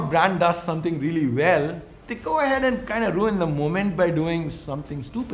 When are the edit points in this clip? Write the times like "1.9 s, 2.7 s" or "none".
none